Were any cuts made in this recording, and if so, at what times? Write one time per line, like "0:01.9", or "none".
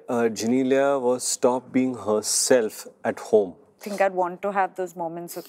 0:03.8